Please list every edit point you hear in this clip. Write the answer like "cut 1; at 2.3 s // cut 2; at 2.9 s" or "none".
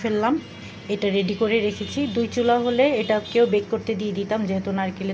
none